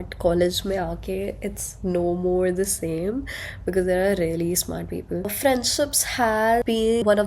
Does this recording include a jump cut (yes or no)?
yes